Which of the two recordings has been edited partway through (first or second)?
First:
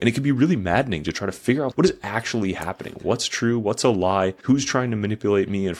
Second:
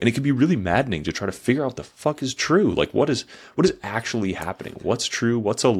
first